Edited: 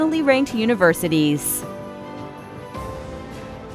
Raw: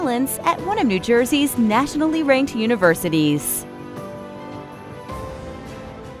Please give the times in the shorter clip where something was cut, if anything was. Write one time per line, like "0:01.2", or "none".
0:01.4